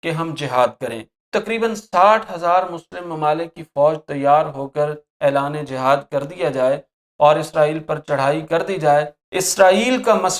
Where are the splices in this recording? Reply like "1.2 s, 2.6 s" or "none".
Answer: 1.2 s